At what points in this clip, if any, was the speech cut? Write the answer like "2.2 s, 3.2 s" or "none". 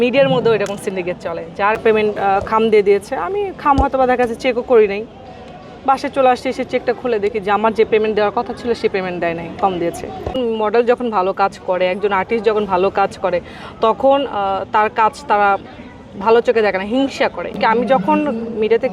1.8 s, 10.4 s, 17.6 s